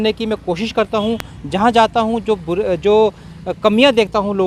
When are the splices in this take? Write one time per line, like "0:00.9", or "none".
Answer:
none